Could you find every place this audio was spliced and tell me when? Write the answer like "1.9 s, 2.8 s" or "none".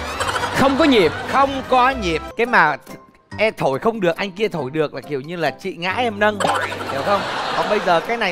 2.3 s